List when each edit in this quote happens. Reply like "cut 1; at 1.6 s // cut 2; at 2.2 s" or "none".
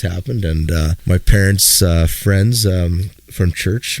cut 1; at 1.0 s